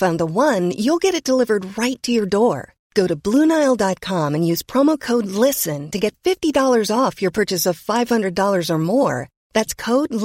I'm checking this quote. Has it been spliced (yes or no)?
no